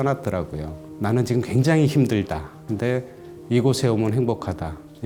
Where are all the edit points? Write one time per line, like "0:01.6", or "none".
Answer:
none